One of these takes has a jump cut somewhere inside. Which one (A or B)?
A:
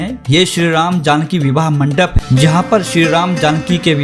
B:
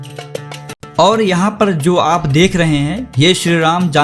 A